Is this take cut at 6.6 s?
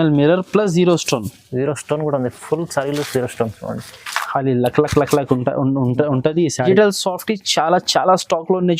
yes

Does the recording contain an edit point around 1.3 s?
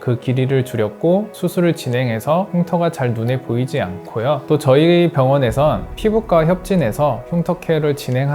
yes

